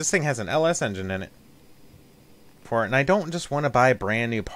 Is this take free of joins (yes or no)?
no